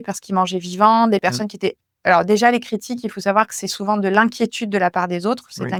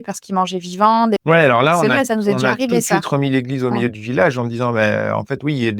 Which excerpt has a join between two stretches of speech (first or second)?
second